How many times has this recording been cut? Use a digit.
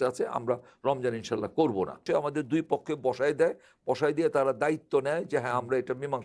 1